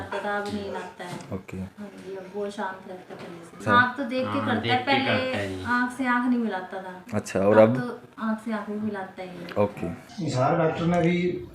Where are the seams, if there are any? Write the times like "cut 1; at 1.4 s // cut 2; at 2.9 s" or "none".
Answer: cut 1; at 3.6 s // cut 2; at 10.0 s